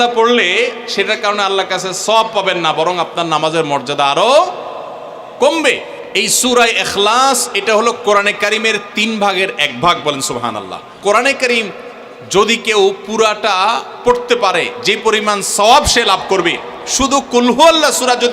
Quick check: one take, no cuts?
no; 2 cuts; at 6.0 s, 10.9 s

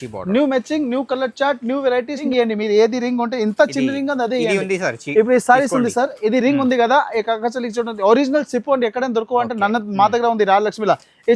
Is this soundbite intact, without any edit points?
no; 1 cut; at 2.3 s

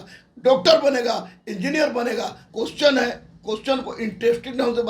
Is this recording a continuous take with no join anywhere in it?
no; 1 cut; at 2.4 s

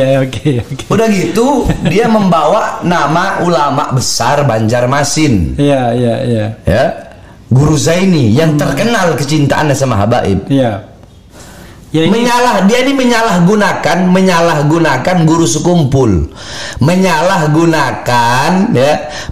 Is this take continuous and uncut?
no; 1 cut; at 11.4 s

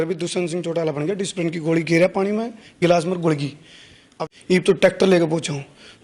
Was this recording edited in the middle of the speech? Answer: yes; 1 cut; at 4.2 s

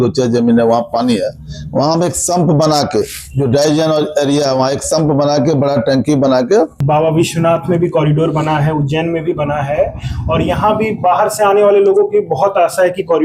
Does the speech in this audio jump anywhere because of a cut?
yes; 1 cut; at 6.8 s

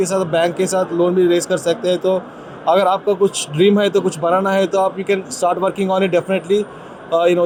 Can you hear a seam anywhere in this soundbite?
no; 0 cuts

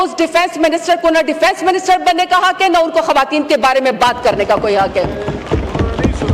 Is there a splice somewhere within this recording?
no; 0 cuts

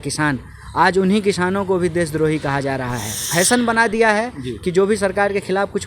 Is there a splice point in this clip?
yes; 1 cut; at 3.3 s

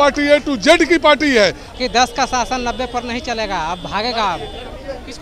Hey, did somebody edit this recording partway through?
yes; 1 cut; at 1.7 s

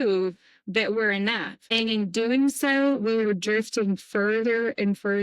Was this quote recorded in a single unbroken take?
no; 1 cut; at 1.6 s

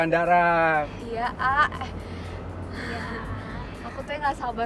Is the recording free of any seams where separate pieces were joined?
yes; 0 cuts

